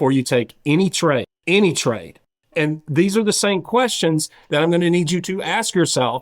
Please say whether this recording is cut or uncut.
cut